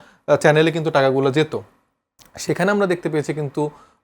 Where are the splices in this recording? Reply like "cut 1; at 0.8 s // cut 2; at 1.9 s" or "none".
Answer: none